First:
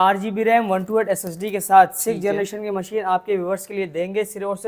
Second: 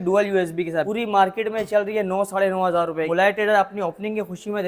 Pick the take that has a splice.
second; 2 cuts; at 0.9 s, 3.1 s

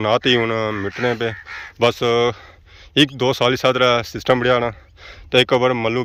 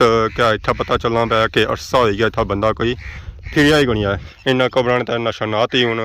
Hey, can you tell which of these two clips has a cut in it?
second; 1 cut; at 4.2 s

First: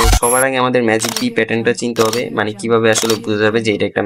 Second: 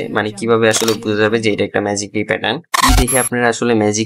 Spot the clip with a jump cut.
second; 1 cut; at 2.7 s

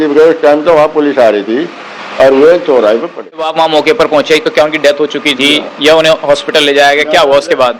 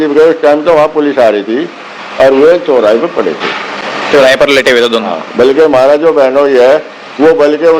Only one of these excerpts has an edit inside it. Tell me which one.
first; 1 cut; at 3.5 s

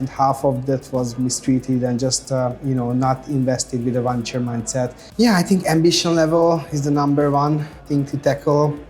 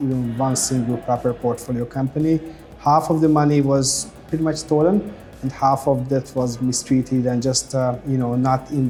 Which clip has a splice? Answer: first; 2 cuts; at 5.0 s, 7.8 s

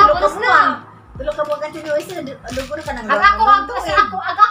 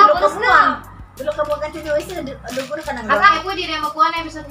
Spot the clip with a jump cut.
second; 1 cut; at 3.3 s

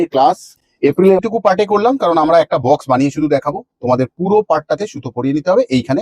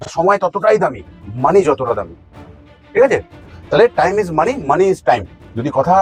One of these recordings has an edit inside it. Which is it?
first; 1 cut; at 1.2 s

